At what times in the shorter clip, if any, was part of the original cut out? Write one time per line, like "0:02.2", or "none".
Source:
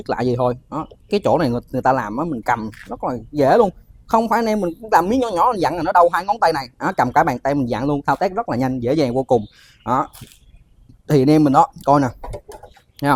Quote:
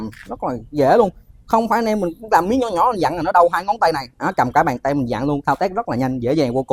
none